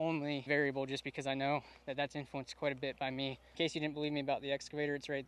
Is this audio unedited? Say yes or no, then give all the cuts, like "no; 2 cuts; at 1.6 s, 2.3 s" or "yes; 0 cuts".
no; 1 cut; at 3.4 s